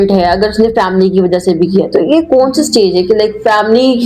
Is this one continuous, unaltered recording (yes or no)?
yes